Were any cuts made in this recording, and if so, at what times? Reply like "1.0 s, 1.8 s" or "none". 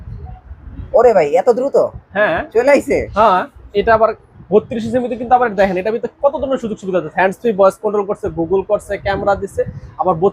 3.6 s